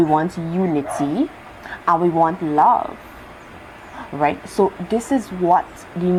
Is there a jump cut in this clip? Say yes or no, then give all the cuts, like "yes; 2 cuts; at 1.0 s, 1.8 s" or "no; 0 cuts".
no; 0 cuts